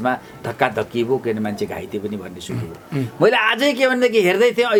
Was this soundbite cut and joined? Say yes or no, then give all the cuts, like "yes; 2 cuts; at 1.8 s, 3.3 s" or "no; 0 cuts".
no; 0 cuts